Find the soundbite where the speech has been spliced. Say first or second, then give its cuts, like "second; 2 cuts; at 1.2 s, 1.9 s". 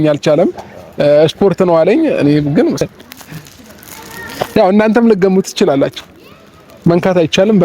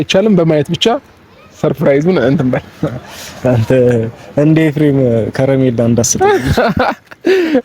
first; 1 cut; at 2.8 s